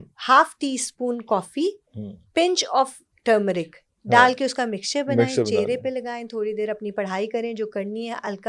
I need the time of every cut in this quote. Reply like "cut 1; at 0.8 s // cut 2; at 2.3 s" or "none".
none